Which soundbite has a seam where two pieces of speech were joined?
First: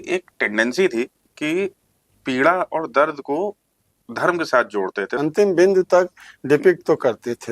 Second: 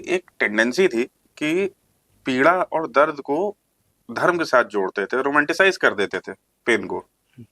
first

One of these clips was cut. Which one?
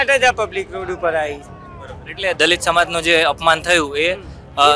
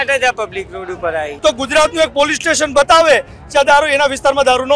second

